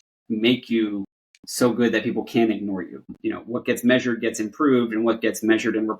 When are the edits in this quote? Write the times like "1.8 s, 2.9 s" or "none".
3.1 s

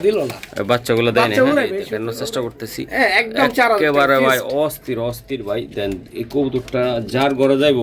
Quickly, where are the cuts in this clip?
1.6 s

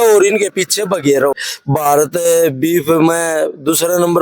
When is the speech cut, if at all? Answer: 1.3 s

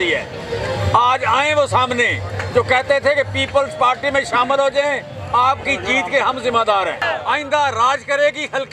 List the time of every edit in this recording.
7.0 s

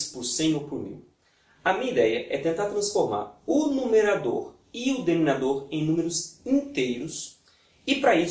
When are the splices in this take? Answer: 6.6 s

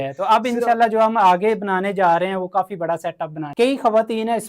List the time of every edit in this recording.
3.4 s

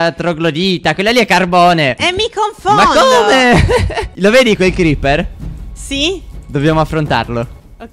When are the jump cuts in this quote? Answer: 4.1 s

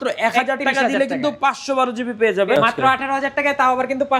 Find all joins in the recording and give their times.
2.6 s

